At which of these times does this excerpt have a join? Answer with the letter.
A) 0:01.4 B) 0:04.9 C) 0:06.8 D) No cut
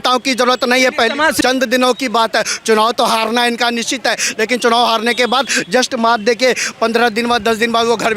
A